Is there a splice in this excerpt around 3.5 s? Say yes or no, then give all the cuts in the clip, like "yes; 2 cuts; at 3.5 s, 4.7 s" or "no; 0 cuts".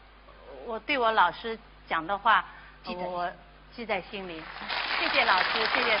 no; 1 cut; at 2.2 s